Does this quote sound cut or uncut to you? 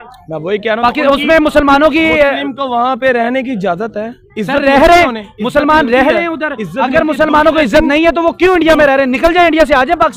uncut